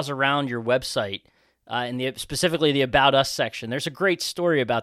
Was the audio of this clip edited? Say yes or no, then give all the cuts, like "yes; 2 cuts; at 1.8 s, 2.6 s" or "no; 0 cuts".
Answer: no; 0 cuts